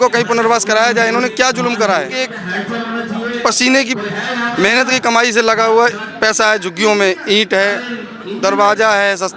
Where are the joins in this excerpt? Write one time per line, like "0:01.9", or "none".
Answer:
0:02.4